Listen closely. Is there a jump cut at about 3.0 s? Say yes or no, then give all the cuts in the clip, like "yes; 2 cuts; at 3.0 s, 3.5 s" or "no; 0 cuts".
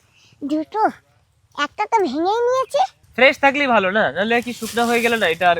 yes; 1 cut; at 3.0 s